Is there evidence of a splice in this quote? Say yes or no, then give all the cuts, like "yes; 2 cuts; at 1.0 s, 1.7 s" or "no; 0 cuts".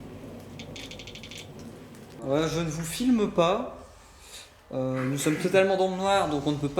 yes; 1 cut; at 2.2 s